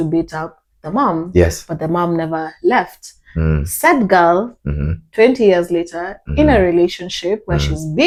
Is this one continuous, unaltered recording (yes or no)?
yes